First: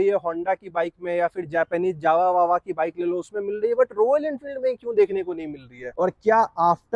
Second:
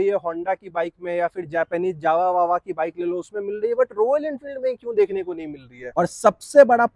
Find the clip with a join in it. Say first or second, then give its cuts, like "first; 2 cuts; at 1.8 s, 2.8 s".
second; 1 cut; at 5.9 s